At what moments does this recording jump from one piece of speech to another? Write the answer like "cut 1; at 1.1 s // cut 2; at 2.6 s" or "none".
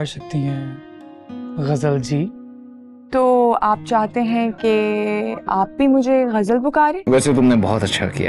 cut 1; at 7.0 s